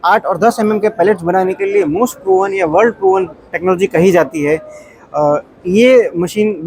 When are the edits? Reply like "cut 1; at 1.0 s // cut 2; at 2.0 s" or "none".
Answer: none